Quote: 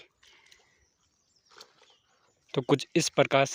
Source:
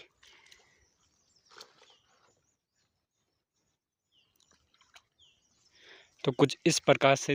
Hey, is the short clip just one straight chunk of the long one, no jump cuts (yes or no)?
no